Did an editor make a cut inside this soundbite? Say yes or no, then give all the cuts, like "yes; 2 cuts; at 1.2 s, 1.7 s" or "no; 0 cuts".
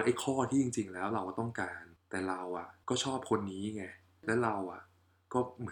no; 0 cuts